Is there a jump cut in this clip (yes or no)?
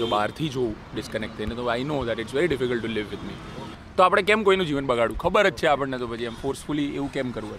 no